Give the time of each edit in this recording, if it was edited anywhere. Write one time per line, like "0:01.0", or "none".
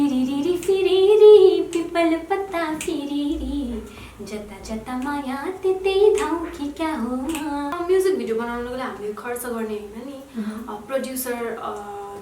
0:07.7